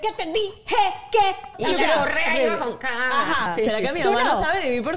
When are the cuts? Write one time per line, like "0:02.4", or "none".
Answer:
0:01.5
0:03.5

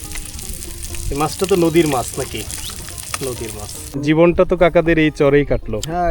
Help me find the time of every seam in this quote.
0:03.9

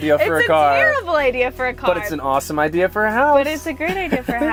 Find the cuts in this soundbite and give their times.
none

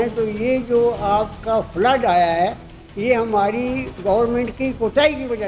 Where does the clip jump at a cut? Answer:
0:03.9

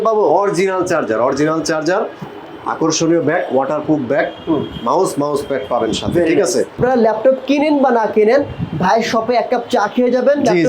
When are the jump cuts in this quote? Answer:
0:06.8

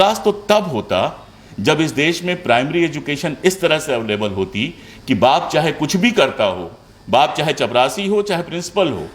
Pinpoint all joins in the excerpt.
none

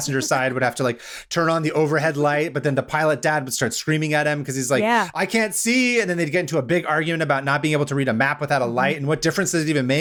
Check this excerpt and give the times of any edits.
none

